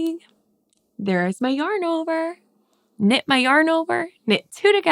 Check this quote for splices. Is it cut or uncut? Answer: uncut